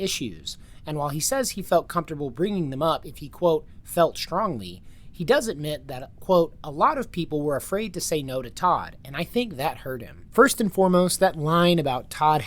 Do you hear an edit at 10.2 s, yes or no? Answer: yes